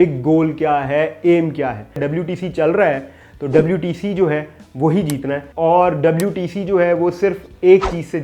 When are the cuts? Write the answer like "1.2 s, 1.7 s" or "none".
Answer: 2.0 s, 5.5 s